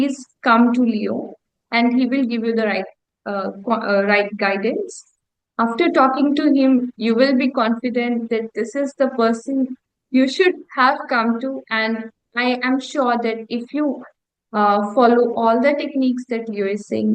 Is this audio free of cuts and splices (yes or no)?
yes